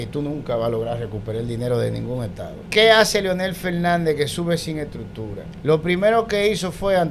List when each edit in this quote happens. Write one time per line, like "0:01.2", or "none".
0:02.6
0:05.5